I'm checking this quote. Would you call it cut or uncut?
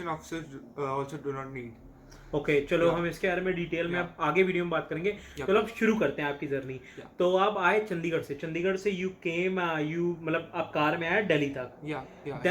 uncut